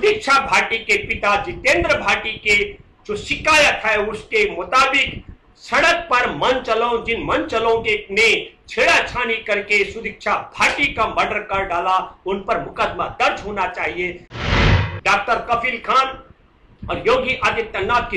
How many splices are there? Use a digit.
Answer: 1